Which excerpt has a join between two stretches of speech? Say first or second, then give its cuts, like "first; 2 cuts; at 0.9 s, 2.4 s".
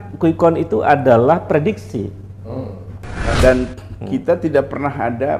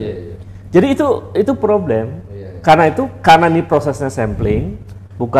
first; 1 cut; at 3.4 s